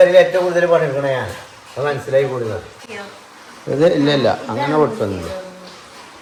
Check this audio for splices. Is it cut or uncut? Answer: uncut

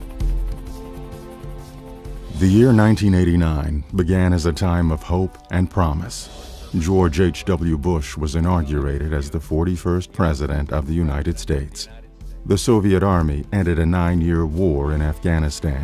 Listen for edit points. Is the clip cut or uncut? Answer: uncut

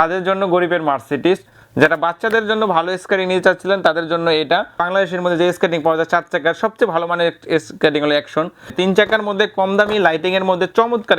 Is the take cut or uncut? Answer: cut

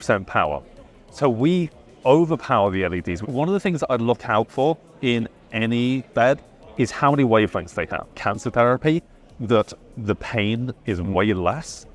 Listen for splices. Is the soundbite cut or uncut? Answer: cut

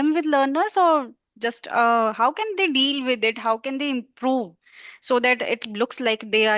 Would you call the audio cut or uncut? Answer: uncut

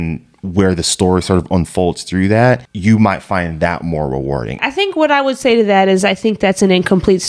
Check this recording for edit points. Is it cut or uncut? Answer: uncut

